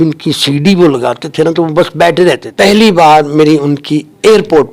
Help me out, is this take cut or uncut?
cut